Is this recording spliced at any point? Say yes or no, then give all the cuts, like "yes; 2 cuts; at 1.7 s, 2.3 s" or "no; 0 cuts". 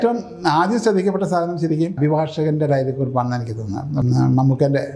yes; 2 cuts; at 2.0 s, 4.0 s